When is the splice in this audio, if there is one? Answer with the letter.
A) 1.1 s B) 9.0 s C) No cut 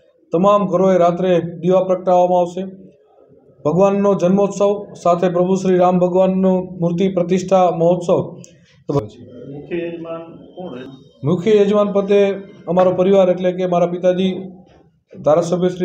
B